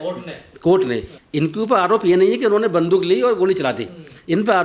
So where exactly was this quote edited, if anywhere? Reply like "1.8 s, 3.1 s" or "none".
1.1 s